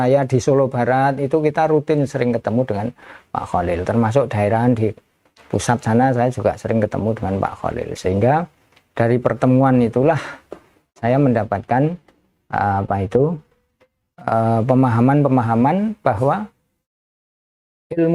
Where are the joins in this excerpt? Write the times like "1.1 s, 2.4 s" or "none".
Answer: none